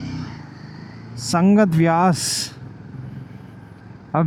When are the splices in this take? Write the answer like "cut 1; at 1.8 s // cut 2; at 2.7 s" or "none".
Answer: none